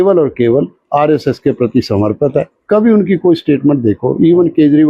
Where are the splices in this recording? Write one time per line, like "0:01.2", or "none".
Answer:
none